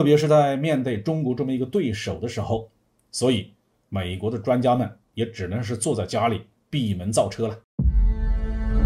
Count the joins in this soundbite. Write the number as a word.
one